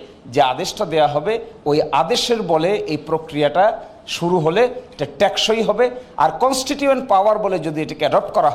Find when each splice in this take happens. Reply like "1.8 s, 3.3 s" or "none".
none